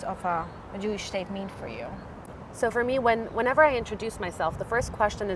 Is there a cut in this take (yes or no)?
no